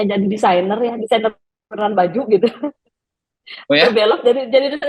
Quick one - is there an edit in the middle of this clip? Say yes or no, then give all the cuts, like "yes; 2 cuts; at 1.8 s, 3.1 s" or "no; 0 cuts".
no; 0 cuts